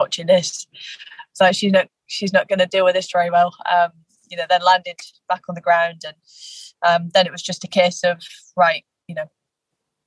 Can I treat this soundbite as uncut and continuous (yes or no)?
yes